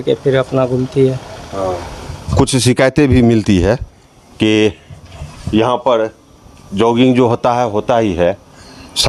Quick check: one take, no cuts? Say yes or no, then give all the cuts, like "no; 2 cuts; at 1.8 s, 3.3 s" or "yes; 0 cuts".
yes; 0 cuts